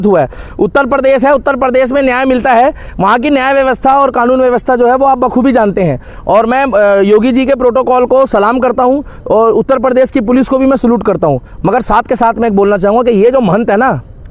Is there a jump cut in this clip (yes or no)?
no